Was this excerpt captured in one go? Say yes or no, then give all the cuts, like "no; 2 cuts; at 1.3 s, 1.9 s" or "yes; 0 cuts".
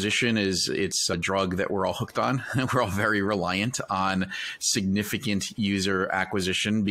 no; 1 cut; at 1.1 s